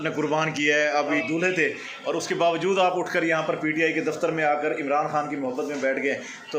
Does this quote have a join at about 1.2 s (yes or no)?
yes